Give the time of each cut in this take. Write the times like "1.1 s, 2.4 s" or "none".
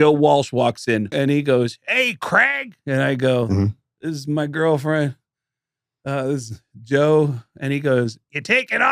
1.1 s